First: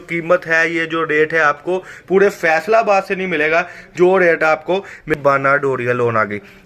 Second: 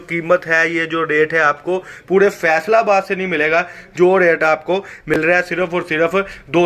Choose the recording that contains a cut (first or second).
first